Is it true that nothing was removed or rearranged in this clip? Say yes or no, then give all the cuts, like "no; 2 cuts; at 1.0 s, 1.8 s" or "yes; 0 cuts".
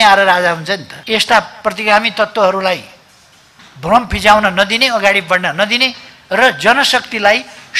no; 1 cut; at 0.9 s